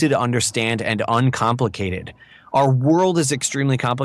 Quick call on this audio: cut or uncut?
uncut